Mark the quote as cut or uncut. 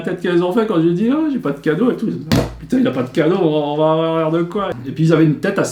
cut